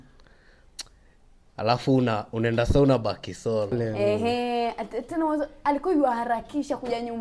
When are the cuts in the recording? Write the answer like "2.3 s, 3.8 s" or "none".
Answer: 3.9 s

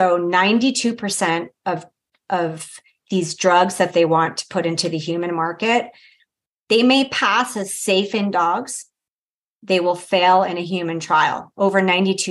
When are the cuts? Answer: none

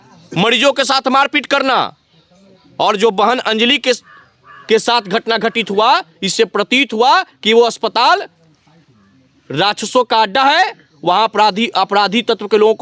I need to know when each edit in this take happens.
none

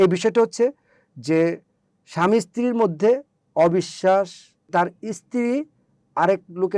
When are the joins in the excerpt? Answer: 4.7 s

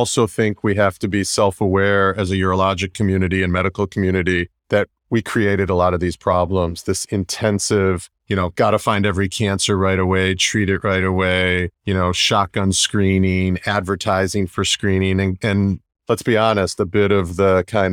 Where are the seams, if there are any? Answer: 4.5 s, 8.1 s, 11.7 s

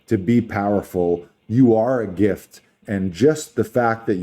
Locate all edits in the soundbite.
2.8 s

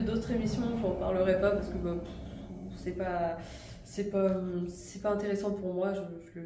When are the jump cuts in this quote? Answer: none

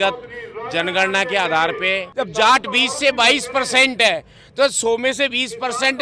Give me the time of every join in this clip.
2.0 s

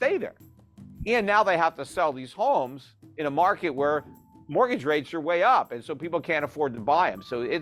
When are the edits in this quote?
none

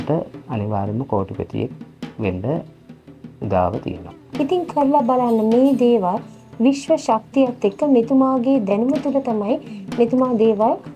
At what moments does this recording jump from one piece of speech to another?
4.2 s

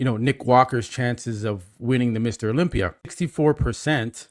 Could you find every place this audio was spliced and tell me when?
3.1 s

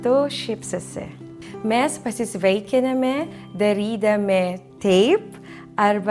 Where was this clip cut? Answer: none

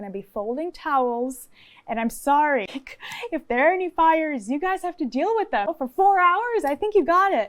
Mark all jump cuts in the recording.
2.7 s, 5.7 s

